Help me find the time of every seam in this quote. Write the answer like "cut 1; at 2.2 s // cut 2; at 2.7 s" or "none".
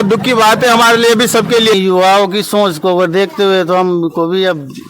cut 1; at 1.7 s